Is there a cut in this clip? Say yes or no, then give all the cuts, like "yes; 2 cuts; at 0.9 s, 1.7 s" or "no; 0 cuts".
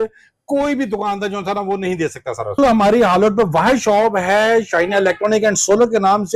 yes; 1 cut; at 2.6 s